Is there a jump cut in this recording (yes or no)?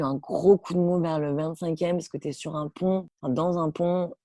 no